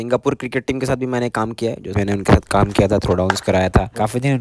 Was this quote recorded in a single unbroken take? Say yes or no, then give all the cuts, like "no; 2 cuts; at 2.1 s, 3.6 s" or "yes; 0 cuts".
no; 1 cut; at 2.0 s